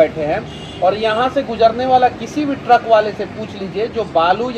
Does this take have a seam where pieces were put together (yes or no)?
no